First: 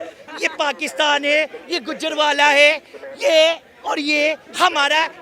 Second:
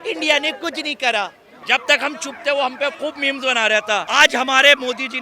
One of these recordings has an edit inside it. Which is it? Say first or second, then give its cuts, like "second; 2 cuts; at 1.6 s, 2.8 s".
second; 2 cuts; at 1.6 s, 4.1 s